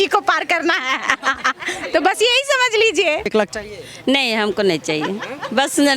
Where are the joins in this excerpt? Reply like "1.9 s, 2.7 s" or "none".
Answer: 3.3 s